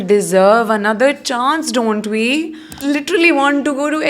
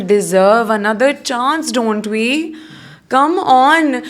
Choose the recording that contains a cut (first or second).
first